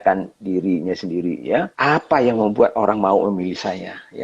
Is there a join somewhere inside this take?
yes; 1 cut; at 1.7 s

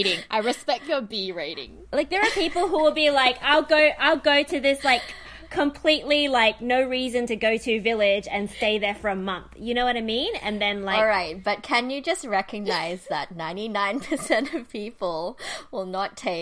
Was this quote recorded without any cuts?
yes; 0 cuts

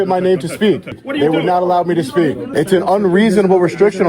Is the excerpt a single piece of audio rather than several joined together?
no; 2 cuts; at 1.0 s, 2.5 s

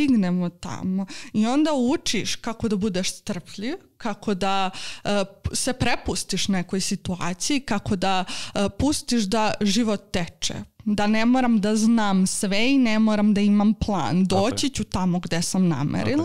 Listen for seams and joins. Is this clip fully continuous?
yes; 0 cuts

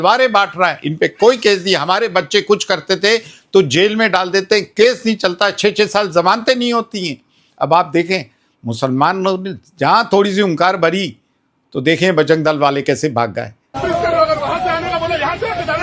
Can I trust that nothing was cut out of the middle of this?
yes; 0 cuts

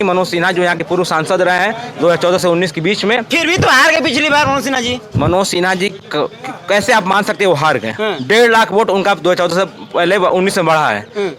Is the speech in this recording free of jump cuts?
yes; 0 cuts

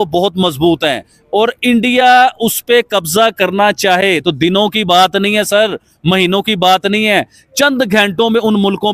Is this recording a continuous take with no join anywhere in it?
yes; 0 cuts

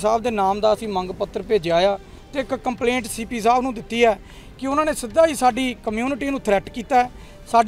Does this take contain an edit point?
yes; 1 cut; at 2.2 s

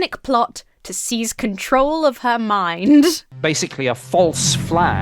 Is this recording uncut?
no; 1 cut; at 3.3 s

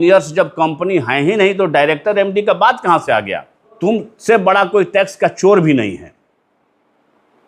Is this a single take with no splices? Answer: no; 1 cut; at 3.7 s

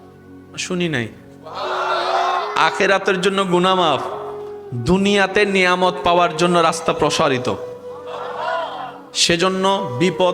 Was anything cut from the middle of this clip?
no; 0 cuts

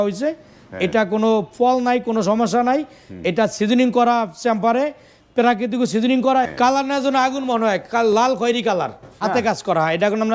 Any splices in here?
yes; 2 cuts; at 6.5 s, 9.2 s

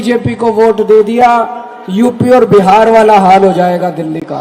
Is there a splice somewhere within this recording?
no; 0 cuts

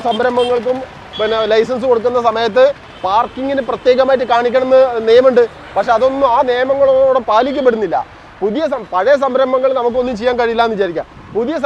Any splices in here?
no; 0 cuts

